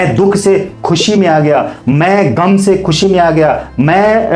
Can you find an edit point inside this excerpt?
no; 0 cuts

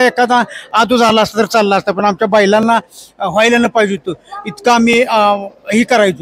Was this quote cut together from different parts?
no; 0 cuts

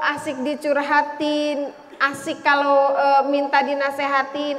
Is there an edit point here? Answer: no; 0 cuts

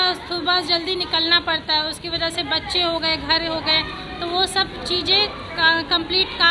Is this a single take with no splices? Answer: yes; 0 cuts

